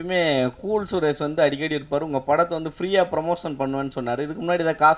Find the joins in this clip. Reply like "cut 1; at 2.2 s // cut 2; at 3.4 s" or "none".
none